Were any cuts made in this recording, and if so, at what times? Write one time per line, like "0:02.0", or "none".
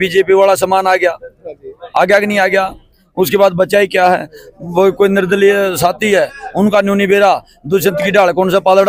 none